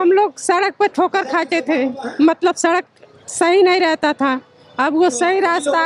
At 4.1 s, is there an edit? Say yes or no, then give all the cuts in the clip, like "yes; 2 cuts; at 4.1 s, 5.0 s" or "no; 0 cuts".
no; 0 cuts